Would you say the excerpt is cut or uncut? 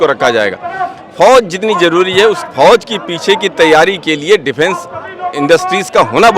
uncut